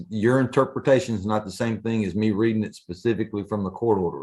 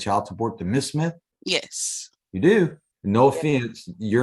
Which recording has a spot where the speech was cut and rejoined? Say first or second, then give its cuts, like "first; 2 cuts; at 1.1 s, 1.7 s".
second; 2 cuts; at 1.3 s, 2.9 s